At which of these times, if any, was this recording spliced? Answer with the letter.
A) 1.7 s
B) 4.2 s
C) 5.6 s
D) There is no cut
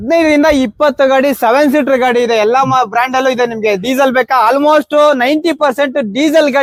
D